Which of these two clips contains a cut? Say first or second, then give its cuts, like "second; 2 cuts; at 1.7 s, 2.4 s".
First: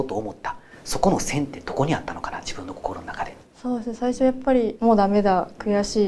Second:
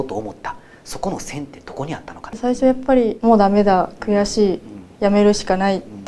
second; 1 cut; at 2.4 s